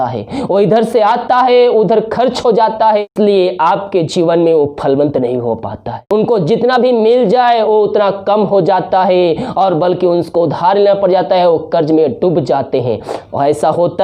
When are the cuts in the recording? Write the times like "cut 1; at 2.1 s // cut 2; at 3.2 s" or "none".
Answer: cut 1; at 3.0 s // cut 2; at 6.0 s